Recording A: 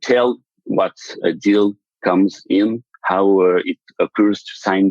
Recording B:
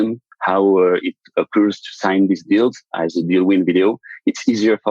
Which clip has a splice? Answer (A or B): A